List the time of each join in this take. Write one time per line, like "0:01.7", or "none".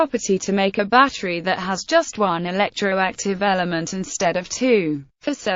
0:03.4